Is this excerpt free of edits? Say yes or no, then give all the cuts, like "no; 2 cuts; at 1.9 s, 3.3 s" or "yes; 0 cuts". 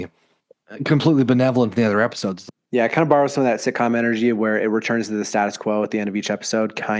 no; 1 cut; at 2.3 s